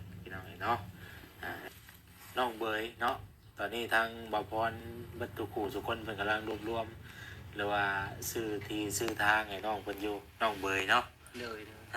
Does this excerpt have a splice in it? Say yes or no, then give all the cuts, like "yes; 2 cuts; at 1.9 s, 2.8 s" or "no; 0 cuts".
yes; 1 cut; at 1.7 s